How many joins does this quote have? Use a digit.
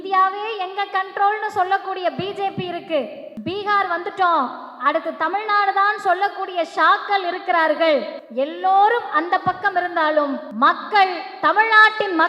3